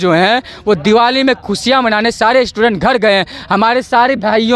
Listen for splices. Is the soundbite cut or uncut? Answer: uncut